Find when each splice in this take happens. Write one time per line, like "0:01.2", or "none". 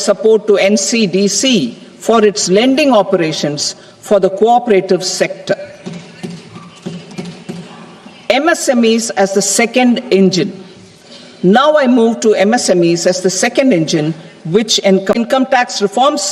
0:15.1